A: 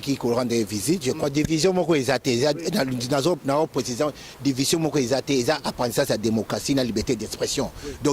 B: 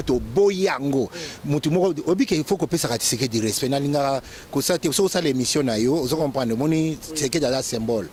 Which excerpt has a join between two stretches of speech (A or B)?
A